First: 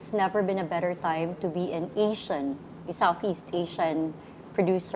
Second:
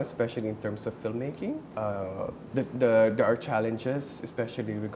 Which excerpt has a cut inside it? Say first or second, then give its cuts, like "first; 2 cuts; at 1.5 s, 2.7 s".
second; 1 cut; at 1.7 s